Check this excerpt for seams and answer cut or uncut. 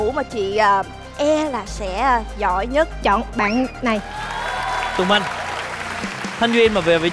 uncut